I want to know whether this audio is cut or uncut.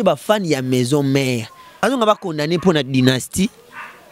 cut